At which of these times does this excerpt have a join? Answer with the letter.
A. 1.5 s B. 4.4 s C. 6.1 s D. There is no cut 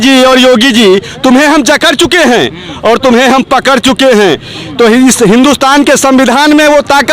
D